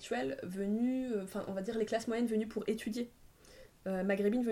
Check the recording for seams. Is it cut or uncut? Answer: uncut